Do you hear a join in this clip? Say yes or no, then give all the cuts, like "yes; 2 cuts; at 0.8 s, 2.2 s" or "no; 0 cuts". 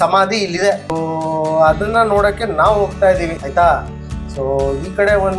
yes; 2 cuts; at 0.9 s, 3.4 s